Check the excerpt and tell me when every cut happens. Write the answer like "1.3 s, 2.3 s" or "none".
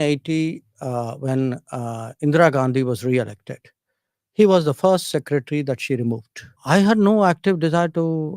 6.6 s